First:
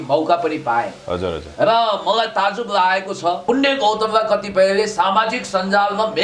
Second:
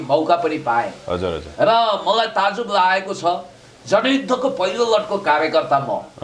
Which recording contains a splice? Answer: first; 1 cut; at 3.4 s

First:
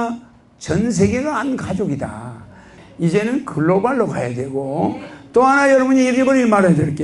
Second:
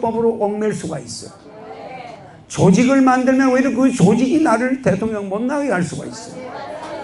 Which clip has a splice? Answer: first; 1 cut; at 2.8 s

